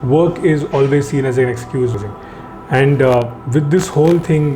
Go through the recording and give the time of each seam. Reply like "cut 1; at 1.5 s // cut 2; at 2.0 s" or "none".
cut 1; at 1.9 s